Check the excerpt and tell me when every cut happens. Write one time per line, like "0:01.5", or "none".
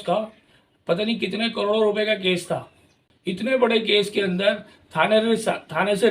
none